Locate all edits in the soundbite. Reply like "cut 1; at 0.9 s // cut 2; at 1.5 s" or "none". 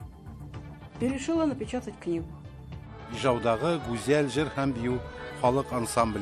cut 1; at 1.0 s